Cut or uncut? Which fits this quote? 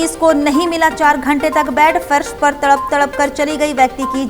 uncut